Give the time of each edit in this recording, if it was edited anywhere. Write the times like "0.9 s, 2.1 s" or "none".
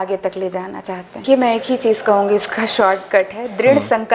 1.2 s

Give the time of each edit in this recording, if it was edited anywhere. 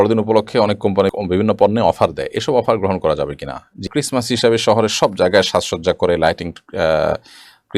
1.1 s, 3.9 s

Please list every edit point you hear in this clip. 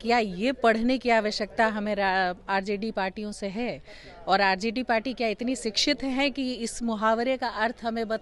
none

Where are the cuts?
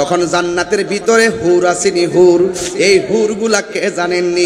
none

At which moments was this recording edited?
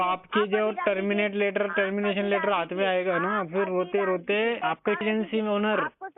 5.0 s

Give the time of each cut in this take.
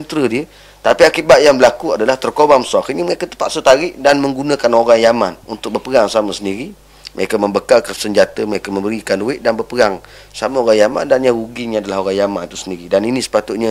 5.5 s, 7.9 s

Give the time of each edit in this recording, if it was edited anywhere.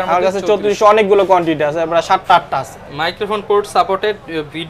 none

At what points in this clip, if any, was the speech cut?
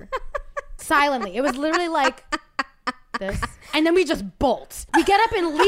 0.8 s, 3.7 s, 4.7 s

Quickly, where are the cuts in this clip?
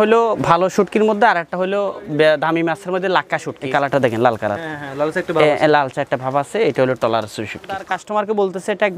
3.6 s, 7.9 s

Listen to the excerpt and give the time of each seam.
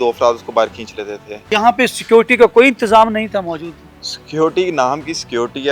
1.4 s

